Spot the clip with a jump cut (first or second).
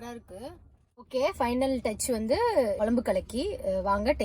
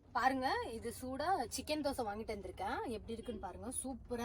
first